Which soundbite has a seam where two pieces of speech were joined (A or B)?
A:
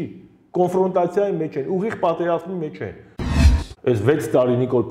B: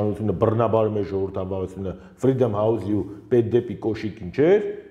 A